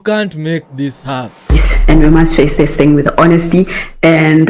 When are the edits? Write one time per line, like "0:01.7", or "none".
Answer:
0:01.6

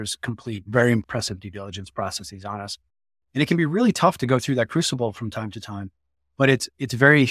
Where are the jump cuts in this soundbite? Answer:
0:01.0

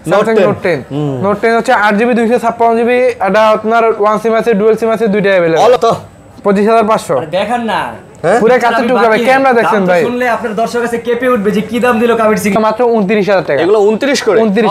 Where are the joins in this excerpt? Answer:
0:05.8
0:12.5

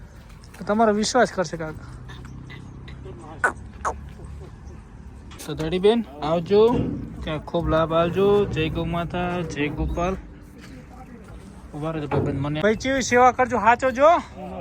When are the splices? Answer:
0:05.4
0:12.6

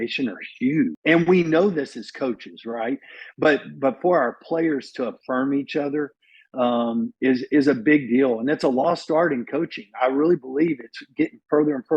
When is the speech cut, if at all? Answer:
0:01.0

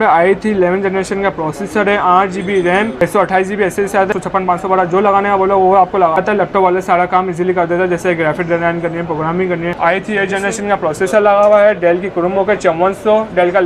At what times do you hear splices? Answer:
0:02.9
0:04.1
0:06.2
0:09.7

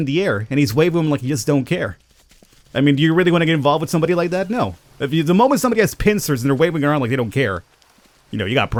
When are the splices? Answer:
none

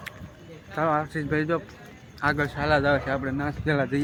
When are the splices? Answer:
none

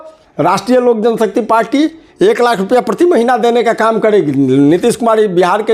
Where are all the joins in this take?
none

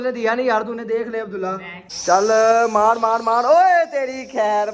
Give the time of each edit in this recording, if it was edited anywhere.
0:01.8

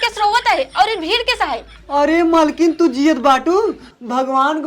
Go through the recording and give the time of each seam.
0:01.7

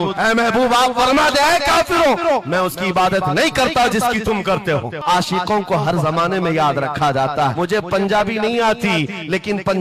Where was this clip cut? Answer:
0:05.0
0:07.5

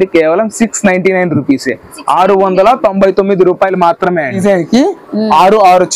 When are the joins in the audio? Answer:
0:04.4

